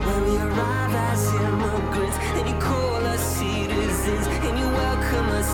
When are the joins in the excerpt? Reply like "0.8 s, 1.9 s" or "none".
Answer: none